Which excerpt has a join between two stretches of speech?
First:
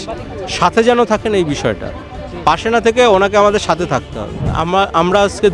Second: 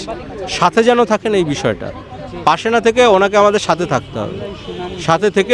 first; 1 cut; at 4.5 s

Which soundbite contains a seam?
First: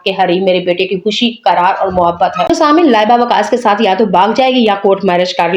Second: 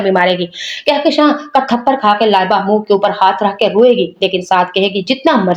first; 1 cut; at 2.4 s

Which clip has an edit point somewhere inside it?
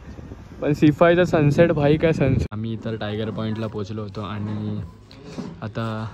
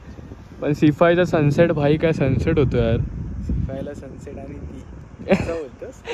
first; 1 cut; at 2.4 s

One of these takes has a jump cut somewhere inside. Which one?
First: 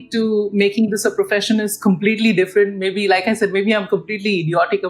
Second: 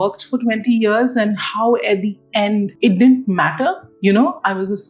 second; 2 cuts; at 2.7 s, 3.9 s

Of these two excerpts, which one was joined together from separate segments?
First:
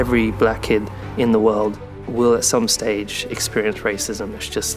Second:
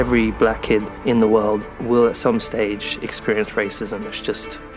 second; 2 cuts; at 0.9 s, 1.7 s

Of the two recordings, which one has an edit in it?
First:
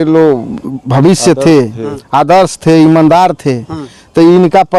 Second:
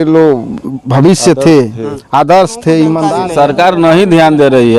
second; 1 cut; at 3.2 s

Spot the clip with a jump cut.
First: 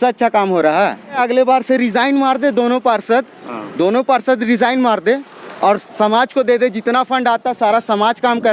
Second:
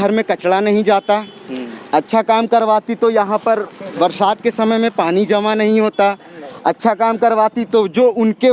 first; 1 cut; at 1.2 s

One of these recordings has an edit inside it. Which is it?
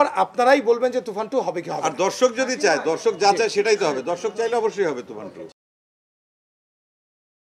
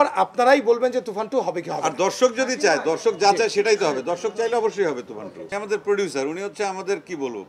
second; 1 cut; at 5.5 s

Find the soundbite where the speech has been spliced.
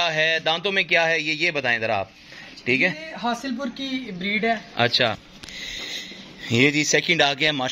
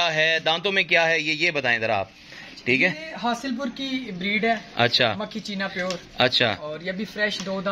first; 1 cut; at 5.3 s

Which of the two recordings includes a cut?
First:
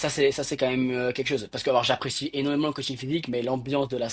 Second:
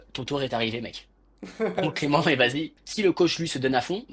second; 1 cut; at 2.7 s

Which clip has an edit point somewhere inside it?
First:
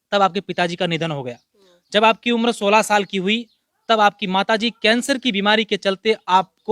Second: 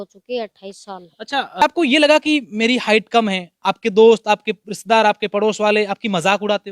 second; 1 cut; at 1.6 s

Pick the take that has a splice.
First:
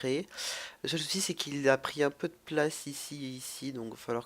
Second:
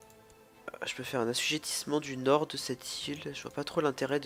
first; 1 cut; at 3.1 s

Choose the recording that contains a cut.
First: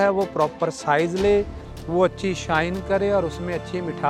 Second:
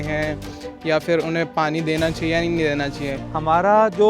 second; 1 cut; at 3.2 s

